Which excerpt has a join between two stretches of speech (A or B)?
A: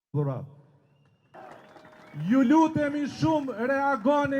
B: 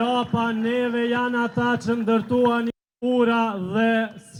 A